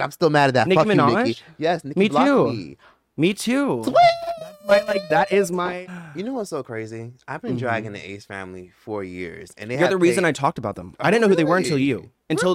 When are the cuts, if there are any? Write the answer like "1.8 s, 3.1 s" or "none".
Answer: 5.6 s